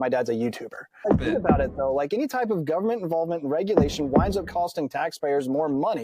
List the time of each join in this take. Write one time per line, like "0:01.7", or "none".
0:01.1